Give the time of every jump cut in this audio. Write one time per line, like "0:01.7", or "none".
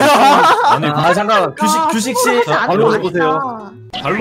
0:01.0